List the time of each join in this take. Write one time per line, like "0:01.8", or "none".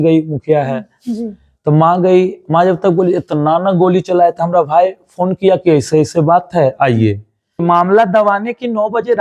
0:07.6